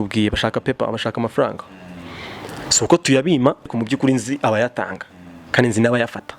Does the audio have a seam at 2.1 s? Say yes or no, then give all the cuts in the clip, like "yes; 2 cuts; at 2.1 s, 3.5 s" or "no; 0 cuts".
no; 1 cut; at 3.7 s